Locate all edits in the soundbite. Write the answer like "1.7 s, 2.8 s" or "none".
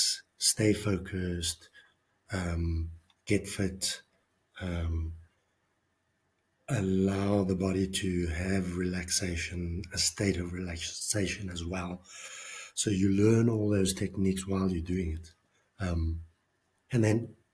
none